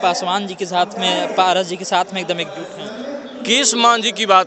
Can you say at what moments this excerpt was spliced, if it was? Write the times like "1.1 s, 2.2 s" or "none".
3.4 s

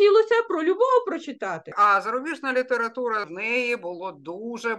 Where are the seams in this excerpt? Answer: 1.7 s, 3.3 s

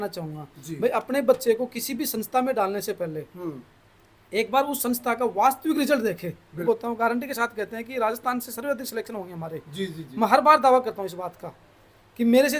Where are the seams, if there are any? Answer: 6.6 s

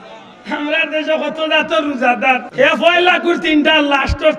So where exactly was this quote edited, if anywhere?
2.5 s

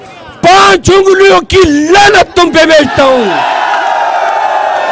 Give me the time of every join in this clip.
none

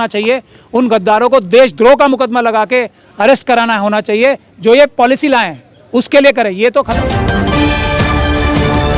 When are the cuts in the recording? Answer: 6.9 s

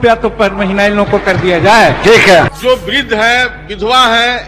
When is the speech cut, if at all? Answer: 2.5 s

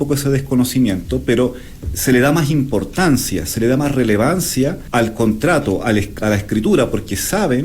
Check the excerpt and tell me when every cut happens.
4.8 s

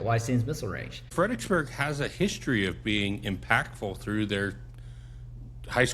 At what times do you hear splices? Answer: 1.1 s

